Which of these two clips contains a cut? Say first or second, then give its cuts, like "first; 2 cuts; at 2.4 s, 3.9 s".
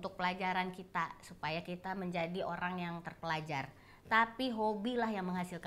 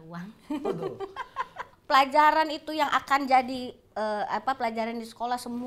second; 1 cut; at 1.6 s